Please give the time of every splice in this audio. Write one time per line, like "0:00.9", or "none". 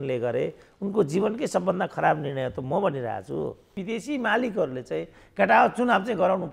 0:03.7